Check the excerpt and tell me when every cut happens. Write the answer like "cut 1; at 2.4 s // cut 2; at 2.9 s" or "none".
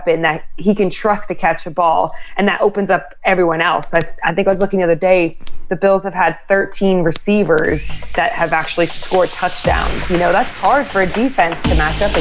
none